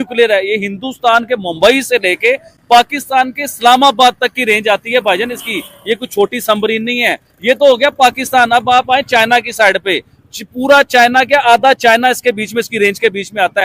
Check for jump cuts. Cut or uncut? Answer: uncut